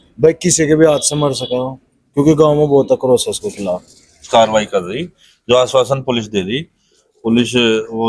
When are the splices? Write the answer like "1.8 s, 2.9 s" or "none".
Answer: 4.2 s